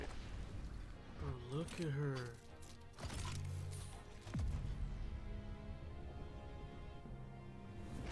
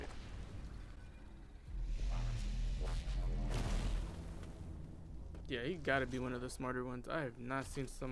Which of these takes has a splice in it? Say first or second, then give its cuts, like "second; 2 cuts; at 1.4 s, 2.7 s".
first; 1 cut; at 1.0 s